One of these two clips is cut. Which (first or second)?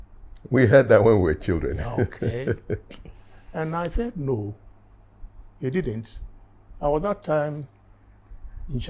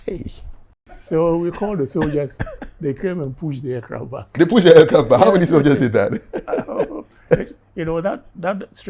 second